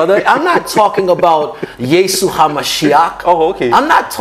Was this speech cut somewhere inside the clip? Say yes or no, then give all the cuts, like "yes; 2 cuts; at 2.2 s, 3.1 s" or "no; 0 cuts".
no; 0 cuts